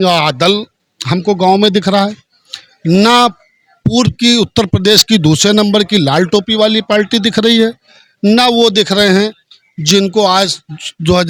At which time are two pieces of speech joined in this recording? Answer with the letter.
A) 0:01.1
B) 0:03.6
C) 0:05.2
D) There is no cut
D